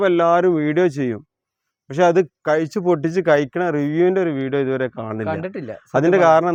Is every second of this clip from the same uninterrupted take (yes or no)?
yes